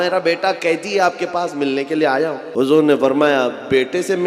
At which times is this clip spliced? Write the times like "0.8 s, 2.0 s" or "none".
2.4 s

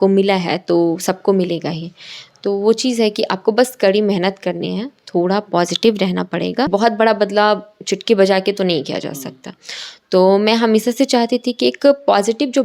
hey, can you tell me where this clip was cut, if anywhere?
6.7 s

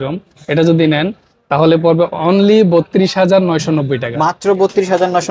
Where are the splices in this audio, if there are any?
none

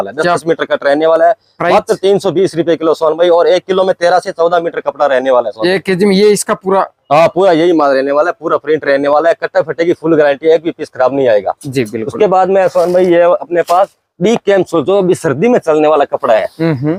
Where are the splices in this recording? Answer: none

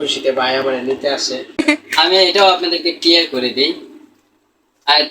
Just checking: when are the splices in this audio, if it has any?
1.6 s

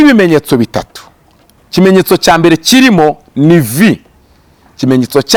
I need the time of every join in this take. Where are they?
none

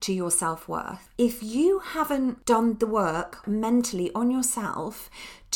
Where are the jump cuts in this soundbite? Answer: 1.0 s, 2.4 s, 3.4 s

